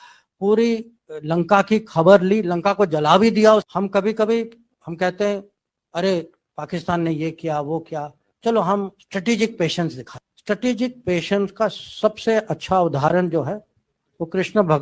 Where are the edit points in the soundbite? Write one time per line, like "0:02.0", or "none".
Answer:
0:03.7